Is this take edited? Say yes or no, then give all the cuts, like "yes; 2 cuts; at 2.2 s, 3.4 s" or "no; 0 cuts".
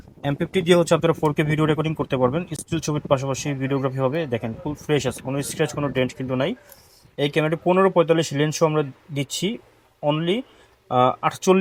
no; 0 cuts